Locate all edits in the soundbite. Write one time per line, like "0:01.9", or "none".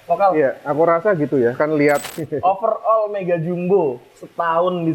0:02.1